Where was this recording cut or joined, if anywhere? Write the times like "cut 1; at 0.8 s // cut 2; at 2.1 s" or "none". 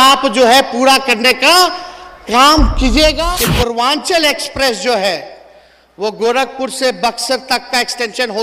cut 1; at 3.2 s